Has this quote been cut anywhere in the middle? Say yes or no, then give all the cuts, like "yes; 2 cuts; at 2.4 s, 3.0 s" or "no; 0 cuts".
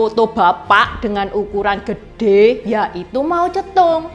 no; 0 cuts